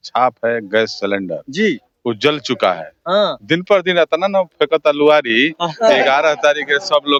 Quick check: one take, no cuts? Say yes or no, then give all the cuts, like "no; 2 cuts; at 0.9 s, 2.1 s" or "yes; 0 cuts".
yes; 0 cuts